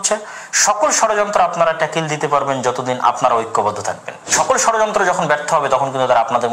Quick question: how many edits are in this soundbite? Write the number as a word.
one